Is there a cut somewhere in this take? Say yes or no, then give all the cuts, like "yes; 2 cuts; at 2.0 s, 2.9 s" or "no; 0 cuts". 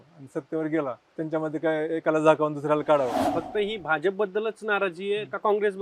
yes; 2 cuts; at 1.0 s, 3.2 s